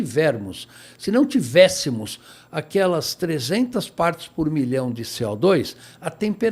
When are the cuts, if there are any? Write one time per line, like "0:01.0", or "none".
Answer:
none